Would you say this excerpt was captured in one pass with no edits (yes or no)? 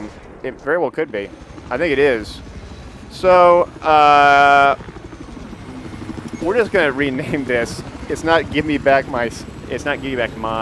no